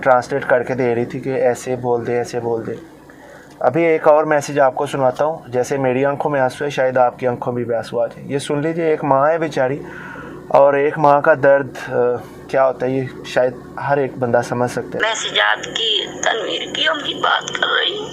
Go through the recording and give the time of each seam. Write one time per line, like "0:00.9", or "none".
0:15.0